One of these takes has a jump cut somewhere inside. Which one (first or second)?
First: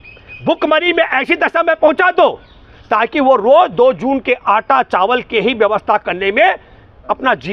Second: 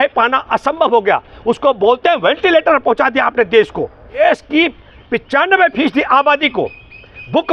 second